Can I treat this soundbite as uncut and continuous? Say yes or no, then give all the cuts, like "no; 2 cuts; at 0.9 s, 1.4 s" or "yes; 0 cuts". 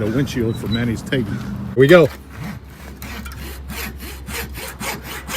no; 1 cut; at 1.8 s